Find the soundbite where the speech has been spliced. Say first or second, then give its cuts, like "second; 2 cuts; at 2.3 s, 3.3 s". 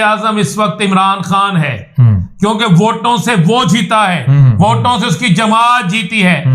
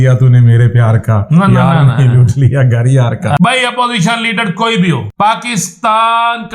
second; 2 cuts; at 3.4 s, 5.1 s